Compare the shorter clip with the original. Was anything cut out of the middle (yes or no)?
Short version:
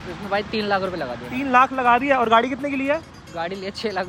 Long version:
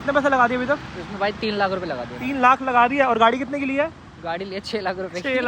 no